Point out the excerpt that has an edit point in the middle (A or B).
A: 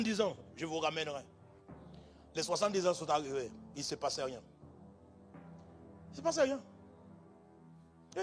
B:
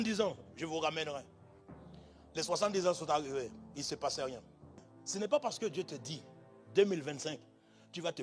B